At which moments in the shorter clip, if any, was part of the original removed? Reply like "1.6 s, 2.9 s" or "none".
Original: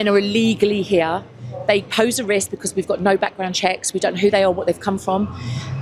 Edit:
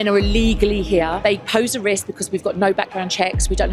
1.2 s